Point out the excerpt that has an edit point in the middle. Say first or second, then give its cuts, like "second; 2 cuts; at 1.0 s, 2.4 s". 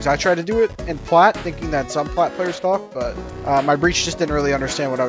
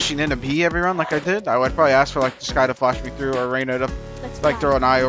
first; 1 cut; at 3.3 s